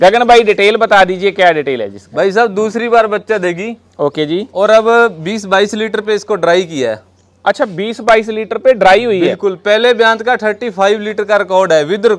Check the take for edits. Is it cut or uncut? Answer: uncut